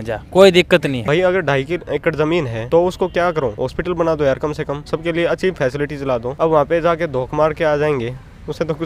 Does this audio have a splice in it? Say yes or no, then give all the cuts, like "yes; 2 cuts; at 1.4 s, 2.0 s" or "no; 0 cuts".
yes; 5 cuts; at 1.0 s, 2.6 s, 3.6 s, 4.8 s, 6.3 s